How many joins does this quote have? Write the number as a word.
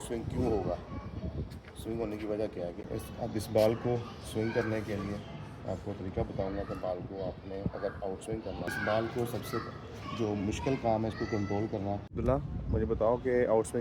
three